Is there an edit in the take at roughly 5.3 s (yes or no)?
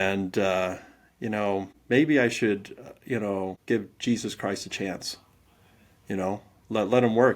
no